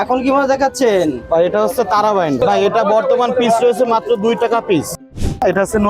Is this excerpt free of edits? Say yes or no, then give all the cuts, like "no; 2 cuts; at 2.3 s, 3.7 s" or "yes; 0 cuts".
no; 2 cuts; at 2.4 s, 5.0 s